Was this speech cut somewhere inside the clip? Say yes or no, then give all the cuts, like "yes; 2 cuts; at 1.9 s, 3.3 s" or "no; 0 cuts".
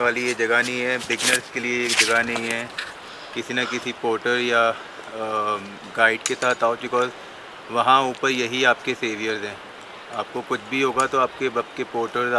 no; 0 cuts